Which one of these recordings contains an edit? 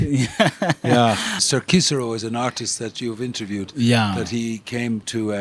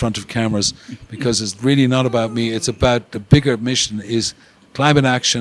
first; 1 cut; at 1.4 s

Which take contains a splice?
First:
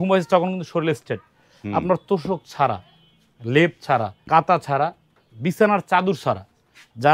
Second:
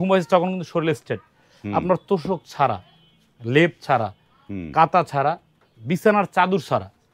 first; 1 cut; at 4.2 s

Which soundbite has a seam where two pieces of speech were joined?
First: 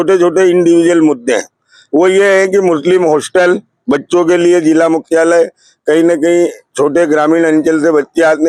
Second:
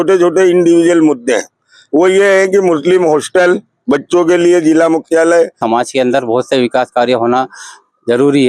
second; 1 cut; at 5.6 s

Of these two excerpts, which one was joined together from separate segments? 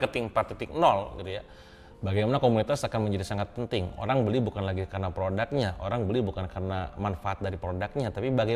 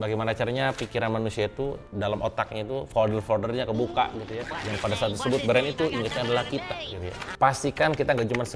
second; 1 cut; at 7.2 s

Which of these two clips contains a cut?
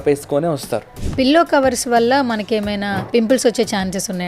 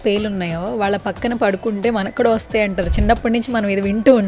first; 2 cuts; at 1.0 s, 3.0 s

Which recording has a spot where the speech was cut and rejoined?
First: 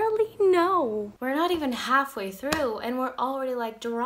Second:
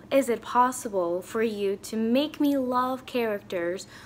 first; 1 cut; at 1.2 s

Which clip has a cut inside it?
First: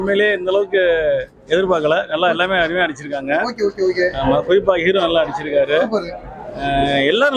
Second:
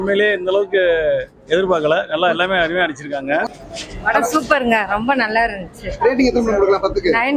second; 1 cut; at 3.5 s

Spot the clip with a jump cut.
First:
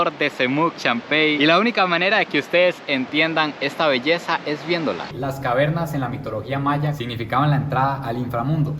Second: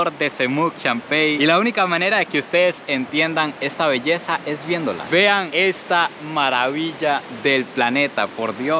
first; 2 cuts; at 5.0 s, 7.0 s

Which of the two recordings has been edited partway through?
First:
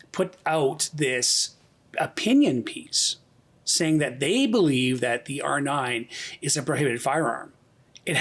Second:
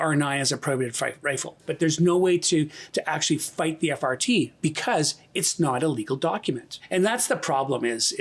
second; 2 cuts; at 1.7 s, 6.7 s

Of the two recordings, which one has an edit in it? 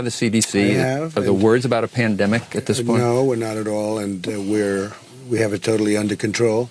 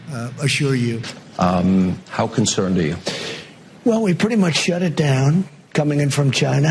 second; 1 cut; at 1.0 s

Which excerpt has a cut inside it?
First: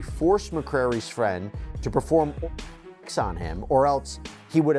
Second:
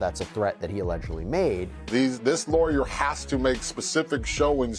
second; 1 cut; at 1.7 s

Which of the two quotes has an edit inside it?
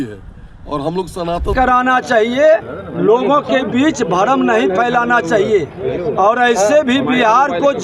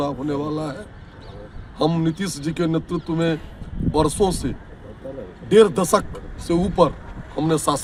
first; 1 cut; at 1.5 s

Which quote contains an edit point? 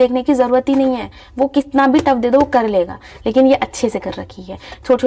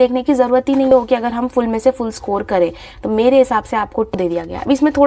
second; 2 cuts; at 0.9 s, 4.2 s

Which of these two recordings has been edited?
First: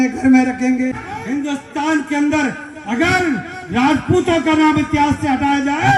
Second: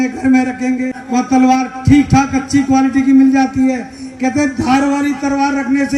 first; 1 cut; at 1.0 s

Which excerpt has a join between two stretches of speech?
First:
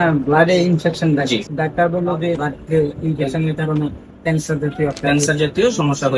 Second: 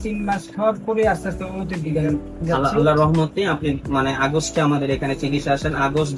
first; 2 cuts; at 1.5 s, 2.4 s

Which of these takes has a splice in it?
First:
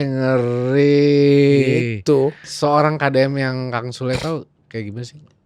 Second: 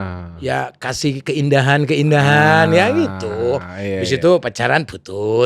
first; 1 cut; at 2.5 s

